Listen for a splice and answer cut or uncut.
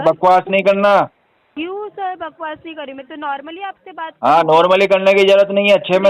uncut